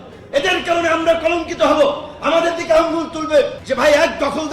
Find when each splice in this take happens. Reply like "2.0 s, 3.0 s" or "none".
3.6 s